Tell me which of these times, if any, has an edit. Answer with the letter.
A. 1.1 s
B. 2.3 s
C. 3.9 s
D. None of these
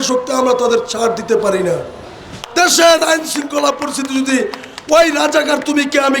B